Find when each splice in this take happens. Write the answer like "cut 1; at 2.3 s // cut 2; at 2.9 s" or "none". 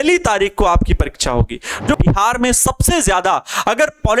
cut 1; at 2.0 s

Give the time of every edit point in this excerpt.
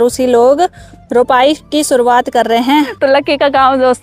cut 1; at 2.9 s

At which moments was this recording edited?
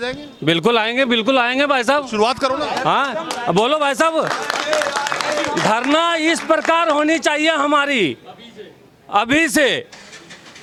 none

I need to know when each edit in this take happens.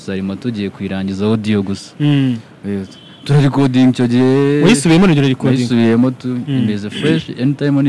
none

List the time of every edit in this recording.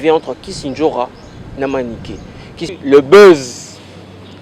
cut 1; at 2.7 s

